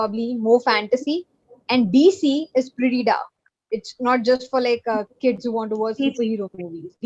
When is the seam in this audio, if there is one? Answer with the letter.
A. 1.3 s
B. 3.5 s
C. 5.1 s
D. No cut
D